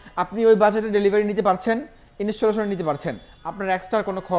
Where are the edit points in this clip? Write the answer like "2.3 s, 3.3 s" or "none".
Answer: none